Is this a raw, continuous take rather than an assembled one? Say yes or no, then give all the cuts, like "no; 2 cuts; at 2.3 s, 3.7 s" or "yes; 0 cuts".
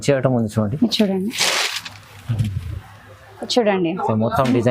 no; 1 cut; at 3.3 s